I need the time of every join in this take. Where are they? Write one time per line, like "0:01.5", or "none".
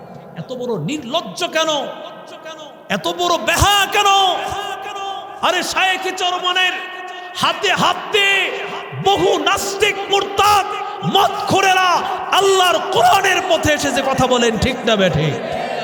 none